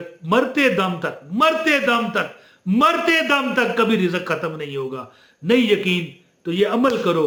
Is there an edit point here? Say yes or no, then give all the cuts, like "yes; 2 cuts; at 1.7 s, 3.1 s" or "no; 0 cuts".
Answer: no; 0 cuts